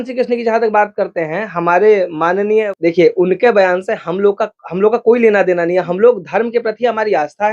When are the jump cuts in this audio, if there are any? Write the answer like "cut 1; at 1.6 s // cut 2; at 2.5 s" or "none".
cut 1; at 2.7 s